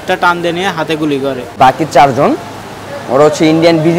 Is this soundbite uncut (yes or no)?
no